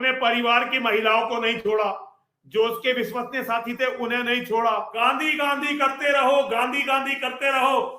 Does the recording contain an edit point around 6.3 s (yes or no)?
no